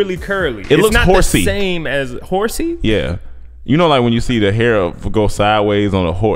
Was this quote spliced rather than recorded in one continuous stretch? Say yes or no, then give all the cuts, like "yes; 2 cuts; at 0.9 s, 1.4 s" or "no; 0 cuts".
no; 0 cuts